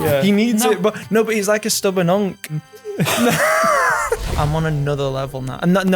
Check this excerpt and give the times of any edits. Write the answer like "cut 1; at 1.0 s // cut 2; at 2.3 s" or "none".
cut 1; at 2.6 s // cut 2; at 4.3 s